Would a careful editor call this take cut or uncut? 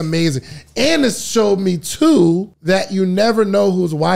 cut